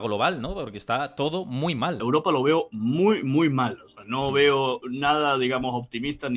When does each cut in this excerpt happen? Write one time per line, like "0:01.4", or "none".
0:02.0